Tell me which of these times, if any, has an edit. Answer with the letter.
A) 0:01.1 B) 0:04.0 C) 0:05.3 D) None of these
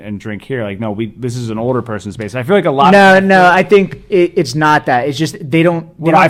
D